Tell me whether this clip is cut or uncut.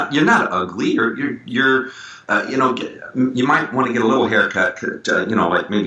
uncut